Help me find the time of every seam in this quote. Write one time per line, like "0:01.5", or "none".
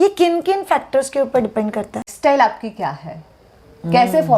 0:02.1